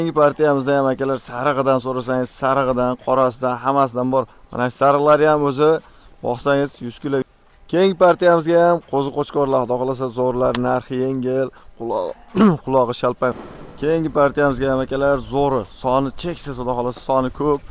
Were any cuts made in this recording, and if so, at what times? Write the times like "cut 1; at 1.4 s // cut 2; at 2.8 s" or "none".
cut 1; at 7.3 s // cut 2; at 13.4 s